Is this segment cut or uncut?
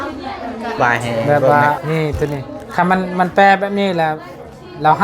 cut